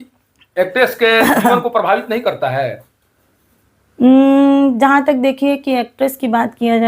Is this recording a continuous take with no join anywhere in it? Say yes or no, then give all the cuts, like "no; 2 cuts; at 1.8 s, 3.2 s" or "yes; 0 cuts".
yes; 0 cuts